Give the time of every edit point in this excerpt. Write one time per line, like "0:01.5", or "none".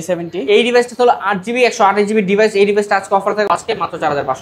0:03.5